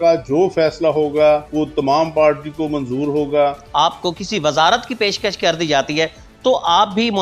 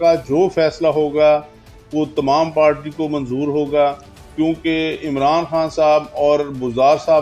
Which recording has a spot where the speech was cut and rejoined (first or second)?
first